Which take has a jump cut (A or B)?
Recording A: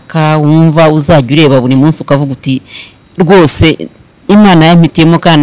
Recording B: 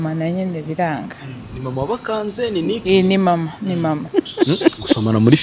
B